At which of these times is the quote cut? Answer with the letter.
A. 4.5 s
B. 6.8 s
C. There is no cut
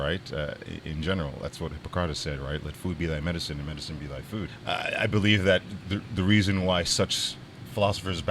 A